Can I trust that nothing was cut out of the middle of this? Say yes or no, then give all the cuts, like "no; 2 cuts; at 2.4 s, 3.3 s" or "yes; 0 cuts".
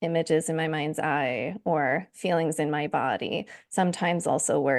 yes; 0 cuts